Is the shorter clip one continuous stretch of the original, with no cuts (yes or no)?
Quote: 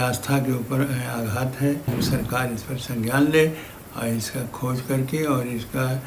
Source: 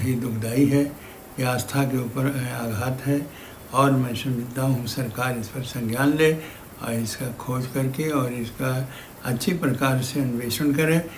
no